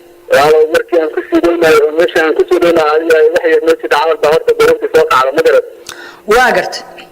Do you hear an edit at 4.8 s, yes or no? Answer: no